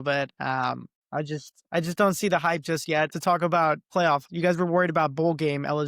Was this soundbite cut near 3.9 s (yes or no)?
yes